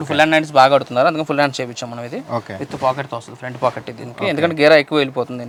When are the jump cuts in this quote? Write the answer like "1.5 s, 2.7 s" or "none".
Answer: none